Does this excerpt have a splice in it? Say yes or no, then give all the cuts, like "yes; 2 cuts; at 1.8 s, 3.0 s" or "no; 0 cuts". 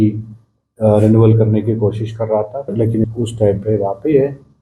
yes; 1 cut; at 3.0 s